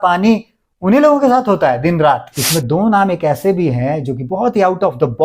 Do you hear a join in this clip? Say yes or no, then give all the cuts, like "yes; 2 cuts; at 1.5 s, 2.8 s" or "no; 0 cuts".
yes; 1 cut; at 2.3 s